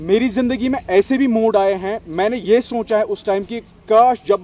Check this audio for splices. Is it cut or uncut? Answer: uncut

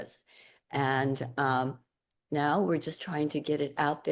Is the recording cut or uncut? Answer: uncut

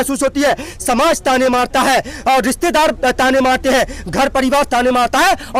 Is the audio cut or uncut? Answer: uncut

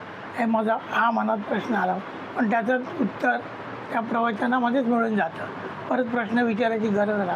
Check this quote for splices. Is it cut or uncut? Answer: uncut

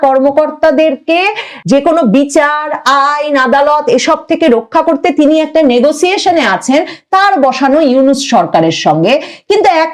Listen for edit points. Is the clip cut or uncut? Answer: cut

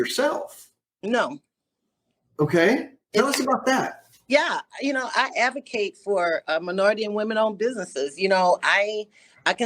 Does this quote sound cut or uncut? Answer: uncut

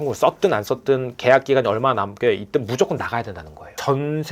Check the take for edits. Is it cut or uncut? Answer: uncut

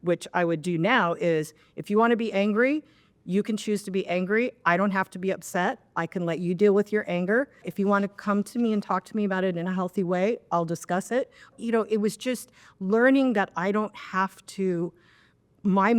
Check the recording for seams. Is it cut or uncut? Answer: cut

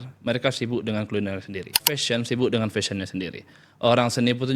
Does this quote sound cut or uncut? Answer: cut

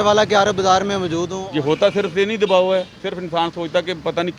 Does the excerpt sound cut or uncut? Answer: cut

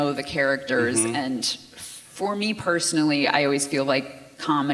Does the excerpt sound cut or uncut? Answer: uncut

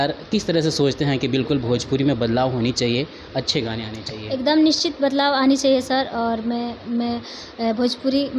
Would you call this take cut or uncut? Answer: uncut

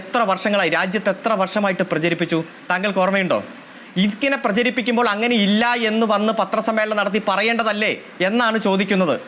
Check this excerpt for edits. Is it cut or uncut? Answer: uncut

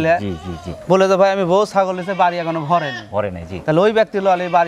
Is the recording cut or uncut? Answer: uncut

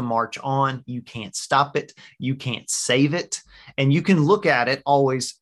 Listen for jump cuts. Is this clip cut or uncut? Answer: uncut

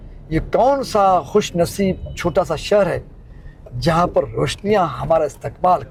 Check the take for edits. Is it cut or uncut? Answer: uncut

